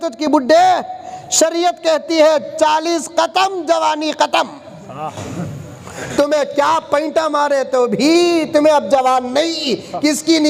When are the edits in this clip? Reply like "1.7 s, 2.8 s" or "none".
none

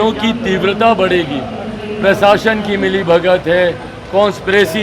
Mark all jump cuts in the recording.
none

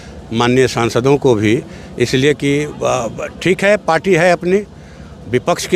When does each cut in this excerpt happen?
none

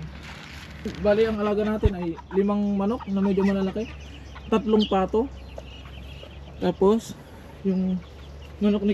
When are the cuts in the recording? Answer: 0.9 s

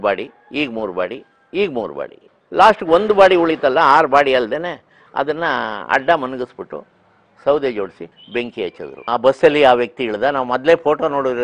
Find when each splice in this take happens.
9.0 s

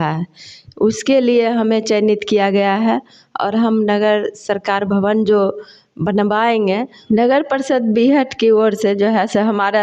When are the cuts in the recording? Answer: 6.9 s

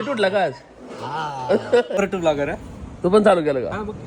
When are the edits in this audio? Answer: 2.0 s

